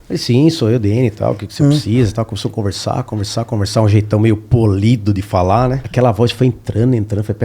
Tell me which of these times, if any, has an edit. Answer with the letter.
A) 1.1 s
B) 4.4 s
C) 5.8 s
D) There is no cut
C